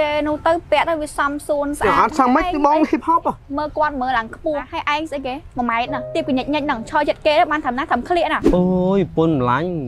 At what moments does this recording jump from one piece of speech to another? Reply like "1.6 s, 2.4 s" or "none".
3.4 s, 4.7 s, 6.1 s, 8.4 s